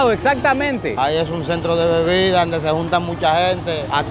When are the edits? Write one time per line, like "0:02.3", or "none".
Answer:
0:00.9